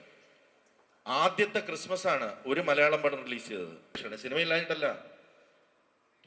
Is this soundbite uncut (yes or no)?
no